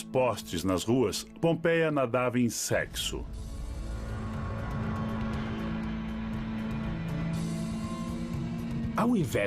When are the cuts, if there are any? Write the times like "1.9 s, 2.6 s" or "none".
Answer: 1.2 s